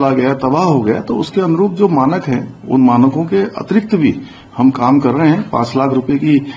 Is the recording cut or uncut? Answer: uncut